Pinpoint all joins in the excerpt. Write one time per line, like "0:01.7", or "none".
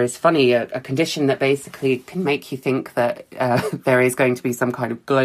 none